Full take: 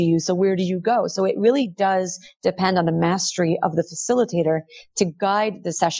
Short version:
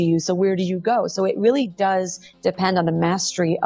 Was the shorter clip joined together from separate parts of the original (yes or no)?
no